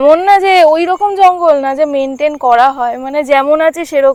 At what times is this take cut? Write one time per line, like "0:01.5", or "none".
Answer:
none